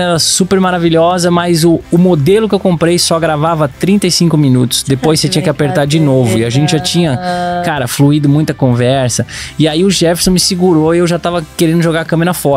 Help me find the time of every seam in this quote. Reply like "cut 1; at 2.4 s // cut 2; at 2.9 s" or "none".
cut 1; at 1.8 s // cut 2; at 11.5 s

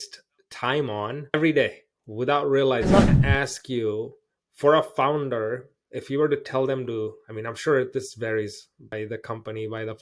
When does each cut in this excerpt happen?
cut 1; at 3.2 s

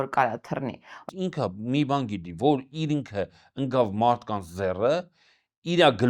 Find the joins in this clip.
cut 1; at 1.0 s

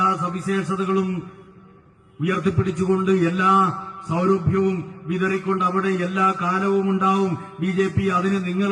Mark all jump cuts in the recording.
none

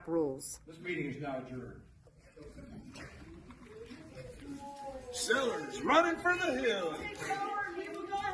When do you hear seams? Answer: none

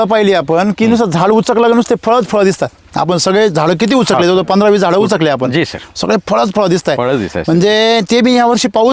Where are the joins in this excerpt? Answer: none

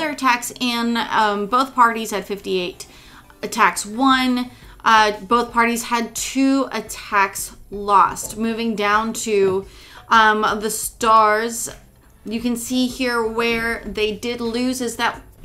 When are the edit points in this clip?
none

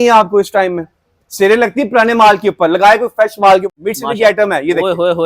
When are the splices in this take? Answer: cut 1; at 3.8 s

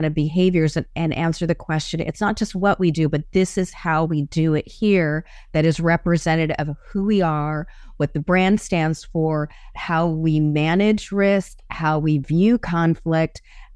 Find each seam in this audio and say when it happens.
none

